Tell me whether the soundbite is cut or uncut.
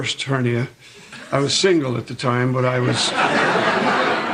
cut